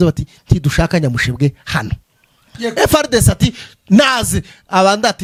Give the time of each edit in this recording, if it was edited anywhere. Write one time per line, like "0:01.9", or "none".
none